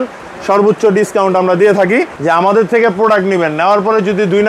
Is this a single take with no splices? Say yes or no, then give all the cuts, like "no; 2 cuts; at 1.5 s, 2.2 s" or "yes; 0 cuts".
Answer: no; 1 cut; at 2.1 s